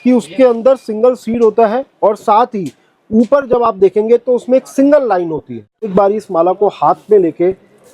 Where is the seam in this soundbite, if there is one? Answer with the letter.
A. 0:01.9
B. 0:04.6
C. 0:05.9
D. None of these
C